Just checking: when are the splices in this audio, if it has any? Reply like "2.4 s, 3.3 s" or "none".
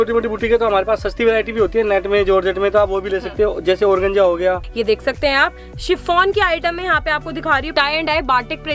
4.7 s, 7.7 s